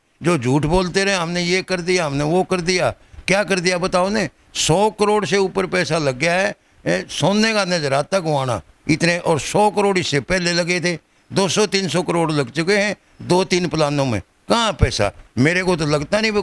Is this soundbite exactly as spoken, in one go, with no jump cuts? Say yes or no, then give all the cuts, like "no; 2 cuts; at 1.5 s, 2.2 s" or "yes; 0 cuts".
yes; 0 cuts